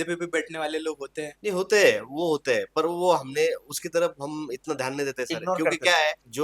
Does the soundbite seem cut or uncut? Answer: uncut